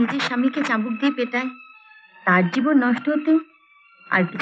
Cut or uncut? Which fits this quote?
uncut